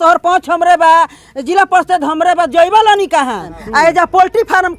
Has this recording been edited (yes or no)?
yes